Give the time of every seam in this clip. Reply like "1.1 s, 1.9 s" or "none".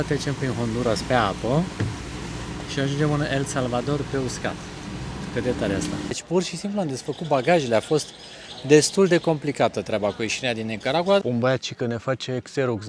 6.1 s, 11.2 s